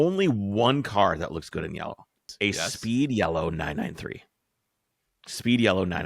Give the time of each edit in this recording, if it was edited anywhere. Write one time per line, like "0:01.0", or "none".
0:02.3